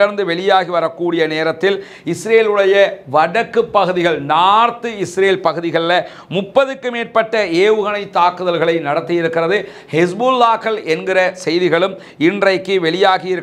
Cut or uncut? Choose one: uncut